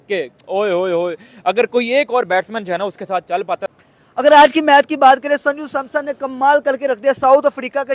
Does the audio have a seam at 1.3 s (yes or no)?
no